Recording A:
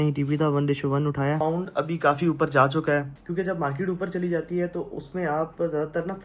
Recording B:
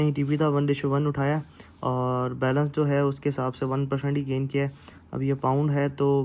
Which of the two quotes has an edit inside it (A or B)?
A